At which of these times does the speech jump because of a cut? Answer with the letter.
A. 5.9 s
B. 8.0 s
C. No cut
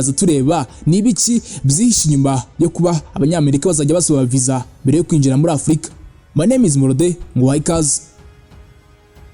B